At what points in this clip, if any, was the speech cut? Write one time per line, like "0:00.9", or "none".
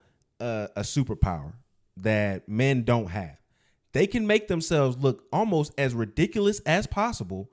none

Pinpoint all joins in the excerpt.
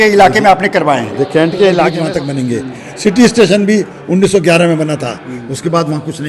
0:01.9

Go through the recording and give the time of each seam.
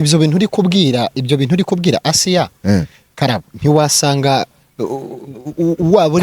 none

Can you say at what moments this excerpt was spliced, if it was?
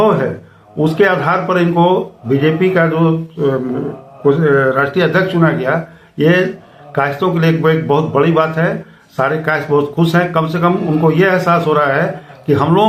none

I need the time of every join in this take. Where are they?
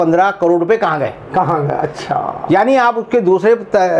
none

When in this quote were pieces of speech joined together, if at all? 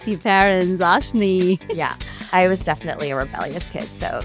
none

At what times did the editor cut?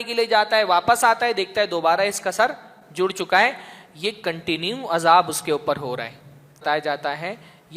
0:06.6

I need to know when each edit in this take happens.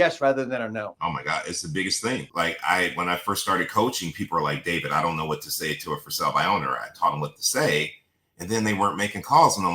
0:00.9
0:02.3

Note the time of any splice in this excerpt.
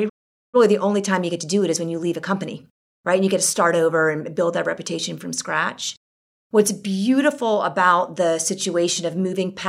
none

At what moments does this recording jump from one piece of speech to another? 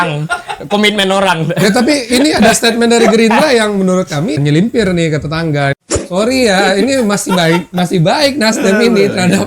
0:04.4
0:05.7

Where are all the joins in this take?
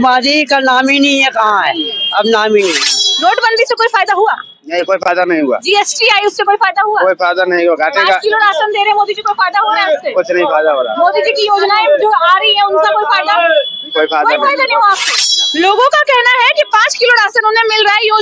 0:03.1
0:15.4

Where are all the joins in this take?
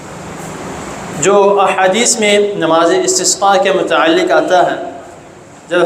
none

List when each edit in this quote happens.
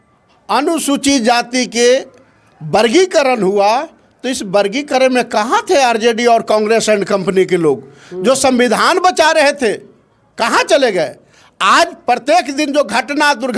none

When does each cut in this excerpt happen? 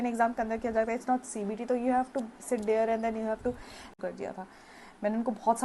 0:03.8

